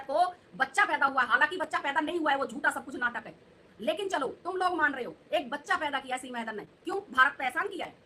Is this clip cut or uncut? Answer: uncut